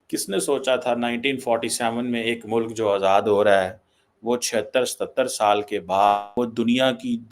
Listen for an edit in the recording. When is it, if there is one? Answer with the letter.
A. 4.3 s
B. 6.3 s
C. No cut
B